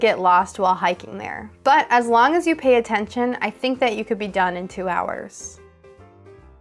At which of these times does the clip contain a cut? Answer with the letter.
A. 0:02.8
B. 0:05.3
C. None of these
B